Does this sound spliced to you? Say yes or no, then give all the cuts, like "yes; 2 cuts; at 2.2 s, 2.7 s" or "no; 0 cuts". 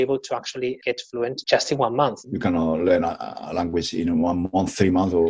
yes; 2 cuts; at 1.2 s, 2.2 s